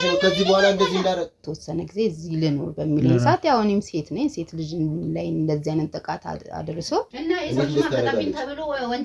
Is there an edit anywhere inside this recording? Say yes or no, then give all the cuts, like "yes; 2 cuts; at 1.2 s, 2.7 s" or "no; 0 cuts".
yes; 2 cuts; at 1.5 s, 7.1 s